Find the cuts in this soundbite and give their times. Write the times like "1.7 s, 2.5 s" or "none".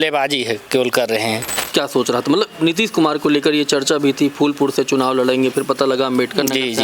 1.5 s